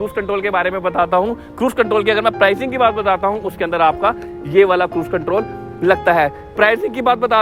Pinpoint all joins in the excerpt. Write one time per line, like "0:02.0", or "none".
none